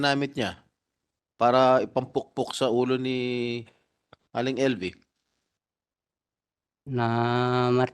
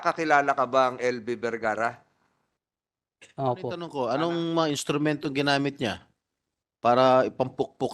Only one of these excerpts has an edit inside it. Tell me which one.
second; 1 cut; at 3.9 s

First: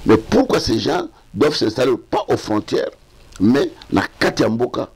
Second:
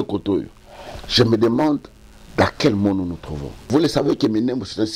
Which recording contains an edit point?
second; 1 cut; at 3.7 s

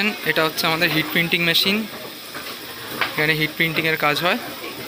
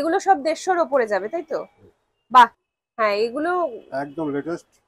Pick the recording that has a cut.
second; 1 cut; at 2.7 s

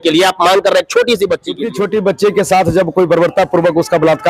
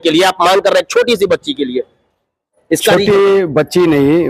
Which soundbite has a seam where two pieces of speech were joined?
first; 1 cut; at 1.7 s

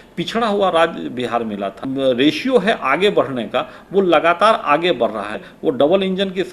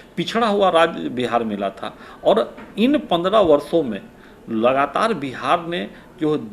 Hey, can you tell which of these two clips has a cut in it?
first; 2 cuts; at 1.8 s, 5.4 s

